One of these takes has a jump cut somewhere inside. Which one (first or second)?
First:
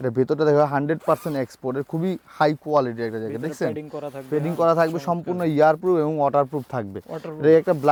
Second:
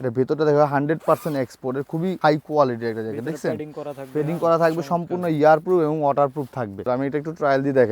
second